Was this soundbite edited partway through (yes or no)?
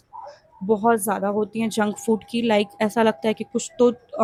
no